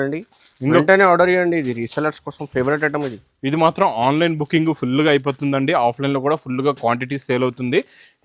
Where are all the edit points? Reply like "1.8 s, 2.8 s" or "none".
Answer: none